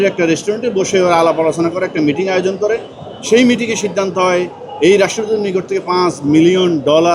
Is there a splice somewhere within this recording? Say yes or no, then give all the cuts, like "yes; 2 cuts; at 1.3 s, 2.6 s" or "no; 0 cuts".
no; 0 cuts